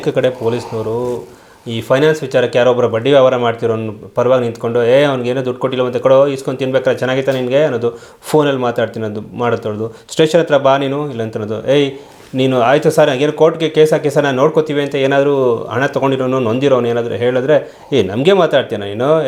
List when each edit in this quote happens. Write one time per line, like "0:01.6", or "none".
none